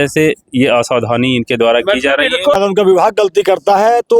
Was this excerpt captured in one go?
no; 1 cut; at 2.6 s

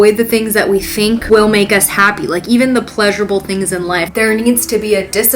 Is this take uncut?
no; 2 cuts; at 1.2 s, 4.1 s

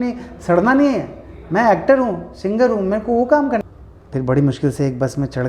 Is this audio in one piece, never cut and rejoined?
no; 1 cut; at 3.6 s

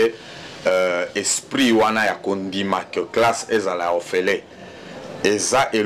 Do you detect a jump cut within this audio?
no; 0 cuts

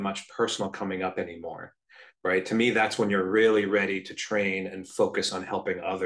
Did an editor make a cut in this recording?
no; 0 cuts

